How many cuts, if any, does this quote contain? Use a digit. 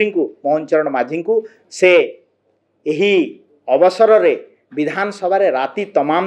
0